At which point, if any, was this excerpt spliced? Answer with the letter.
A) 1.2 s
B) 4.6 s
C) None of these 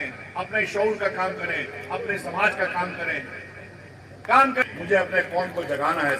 B